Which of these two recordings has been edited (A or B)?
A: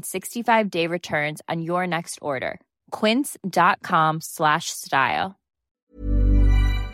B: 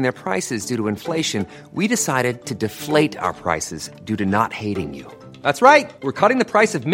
A